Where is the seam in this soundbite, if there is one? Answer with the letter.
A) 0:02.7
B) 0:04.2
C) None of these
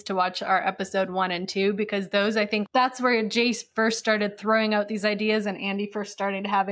A